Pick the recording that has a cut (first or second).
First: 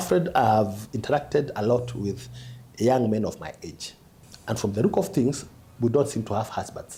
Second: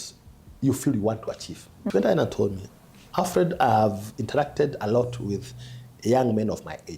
second